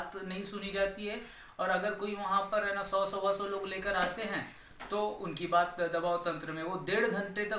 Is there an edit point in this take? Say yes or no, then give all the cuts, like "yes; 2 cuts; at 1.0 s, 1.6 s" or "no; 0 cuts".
no; 0 cuts